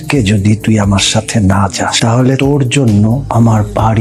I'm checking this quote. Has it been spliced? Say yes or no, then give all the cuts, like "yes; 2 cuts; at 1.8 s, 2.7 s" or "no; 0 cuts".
no; 0 cuts